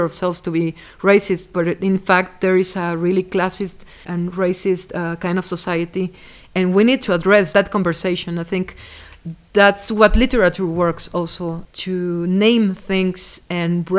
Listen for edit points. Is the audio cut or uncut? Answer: cut